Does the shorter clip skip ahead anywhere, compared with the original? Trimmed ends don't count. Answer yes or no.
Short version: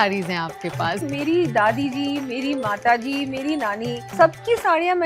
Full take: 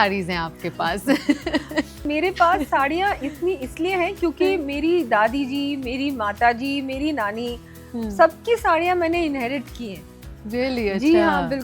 yes